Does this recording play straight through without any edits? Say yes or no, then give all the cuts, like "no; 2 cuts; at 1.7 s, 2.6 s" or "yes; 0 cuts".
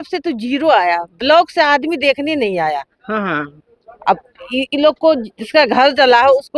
yes; 0 cuts